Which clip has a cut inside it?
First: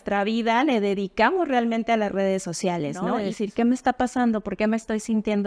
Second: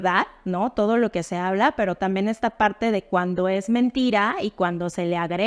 first; 1 cut; at 3.1 s

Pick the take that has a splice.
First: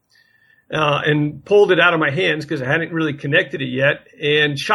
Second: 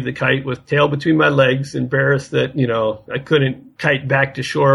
second; 1 cut; at 3.7 s

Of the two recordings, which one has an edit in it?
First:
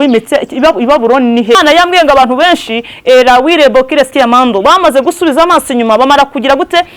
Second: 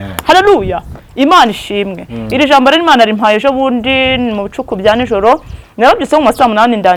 first; 1 cut; at 1.6 s

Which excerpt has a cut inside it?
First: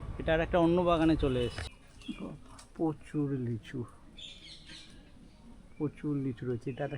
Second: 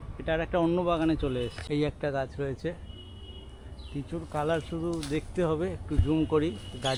first; 1 cut; at 1.6 s

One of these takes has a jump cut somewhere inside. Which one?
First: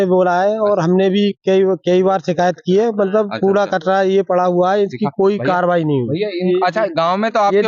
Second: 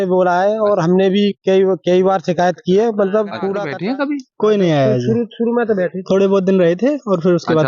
second; 1 cut; at 3.6 s

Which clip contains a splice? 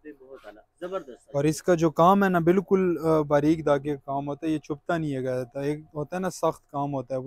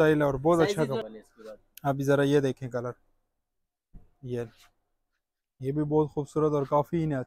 second; 1 cut; at 1.0 s

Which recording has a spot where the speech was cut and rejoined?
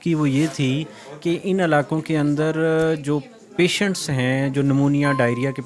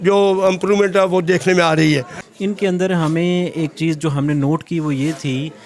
second; 1 cut; at 2.2 s

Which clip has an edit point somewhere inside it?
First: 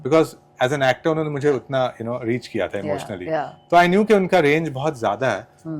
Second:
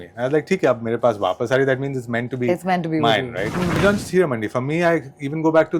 second; 1 cut; at 3.8 s

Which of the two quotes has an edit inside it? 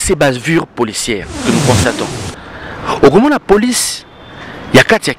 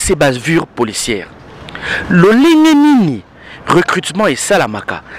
first; 1 cut; at 1.4 s

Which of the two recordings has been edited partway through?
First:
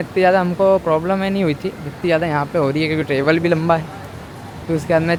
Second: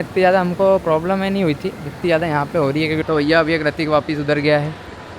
second; 1 cut; at 3.0 s

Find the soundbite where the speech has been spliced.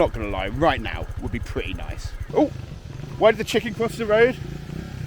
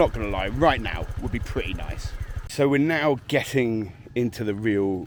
first; 1 cut; at 2.2 s

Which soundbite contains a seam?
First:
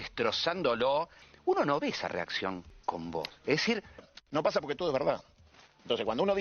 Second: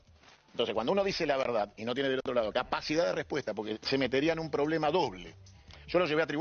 first; 3 cuts; at 1.2 s, 2.7 s, 4.1 s

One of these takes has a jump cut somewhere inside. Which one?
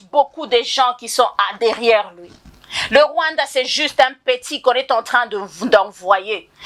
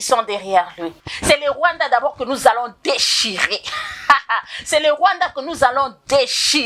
second; 1 cut; at 1.1 s

